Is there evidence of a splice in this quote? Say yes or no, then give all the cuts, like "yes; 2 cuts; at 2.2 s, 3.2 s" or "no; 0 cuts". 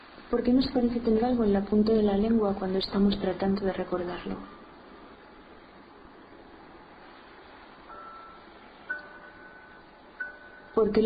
yes; 1 cut; at 8.1 s